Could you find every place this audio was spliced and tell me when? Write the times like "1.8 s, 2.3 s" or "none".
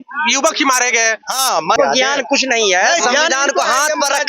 1.8 s